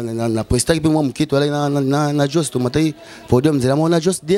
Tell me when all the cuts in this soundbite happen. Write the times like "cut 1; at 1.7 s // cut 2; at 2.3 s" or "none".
none